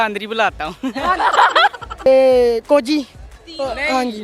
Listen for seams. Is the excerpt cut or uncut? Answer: cut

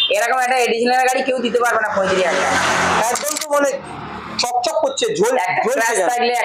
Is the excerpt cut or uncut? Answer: uncut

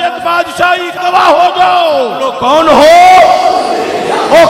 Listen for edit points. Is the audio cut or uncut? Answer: cut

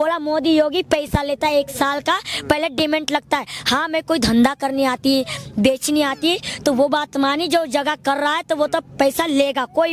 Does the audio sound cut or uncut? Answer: uncut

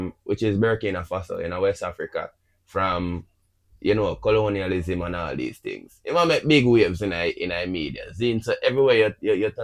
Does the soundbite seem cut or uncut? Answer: uncut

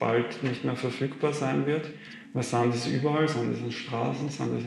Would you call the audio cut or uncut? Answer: cut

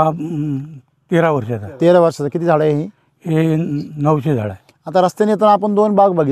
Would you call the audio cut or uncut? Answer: uncut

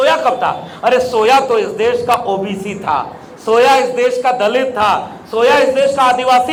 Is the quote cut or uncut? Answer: uncut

